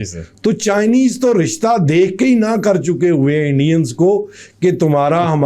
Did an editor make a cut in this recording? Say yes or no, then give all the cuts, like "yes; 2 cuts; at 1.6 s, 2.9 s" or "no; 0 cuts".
no; 0 cuts